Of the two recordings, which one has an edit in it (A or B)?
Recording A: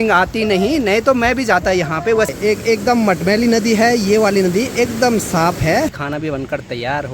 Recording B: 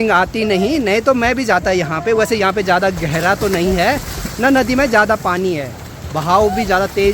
A